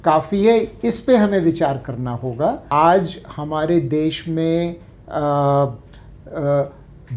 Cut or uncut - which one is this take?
cut